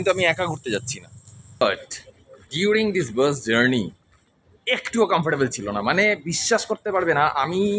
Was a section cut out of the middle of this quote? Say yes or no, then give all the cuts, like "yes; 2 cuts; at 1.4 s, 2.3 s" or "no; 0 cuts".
yes; 1 cut; at 1.6 s